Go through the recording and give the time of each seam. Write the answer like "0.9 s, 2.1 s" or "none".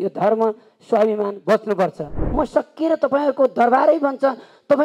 2.1 s